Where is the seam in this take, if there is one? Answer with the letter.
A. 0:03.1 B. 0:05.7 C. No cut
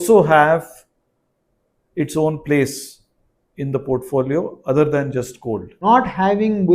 B